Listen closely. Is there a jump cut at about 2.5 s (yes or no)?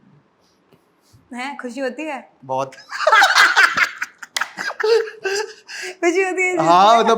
no